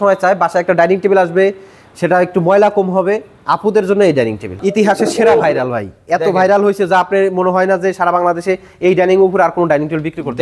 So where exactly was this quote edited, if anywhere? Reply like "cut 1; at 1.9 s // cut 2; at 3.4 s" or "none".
cut 1; at 4.5 s